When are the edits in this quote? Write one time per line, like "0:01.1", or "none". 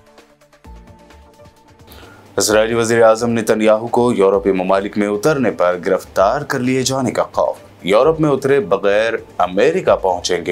0:01.3